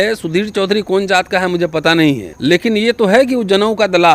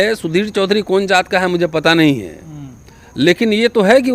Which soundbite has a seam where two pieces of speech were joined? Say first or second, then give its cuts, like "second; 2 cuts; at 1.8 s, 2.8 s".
first; 1 cut; at 2.3 s